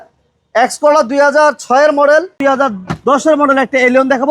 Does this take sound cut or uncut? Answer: cut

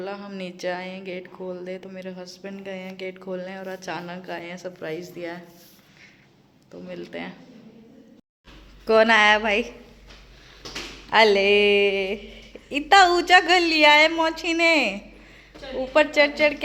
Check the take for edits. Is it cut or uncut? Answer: uncut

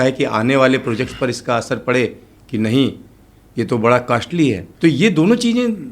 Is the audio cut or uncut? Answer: cut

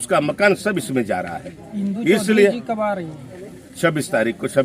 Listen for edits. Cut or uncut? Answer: uncut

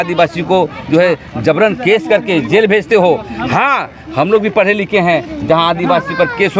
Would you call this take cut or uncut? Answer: uncut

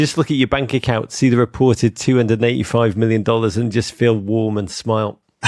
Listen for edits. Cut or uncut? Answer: uncut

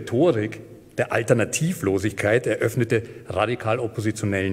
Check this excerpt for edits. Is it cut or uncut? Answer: uncut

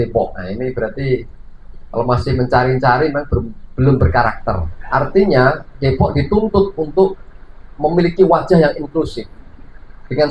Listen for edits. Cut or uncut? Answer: cut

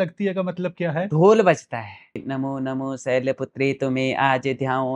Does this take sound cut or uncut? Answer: cut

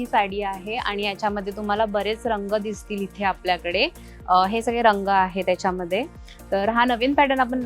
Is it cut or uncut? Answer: uncut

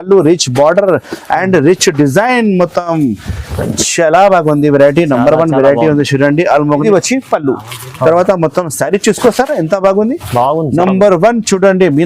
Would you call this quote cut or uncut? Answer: cut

